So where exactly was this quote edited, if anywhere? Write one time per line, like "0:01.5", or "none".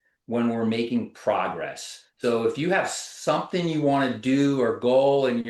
0:02.0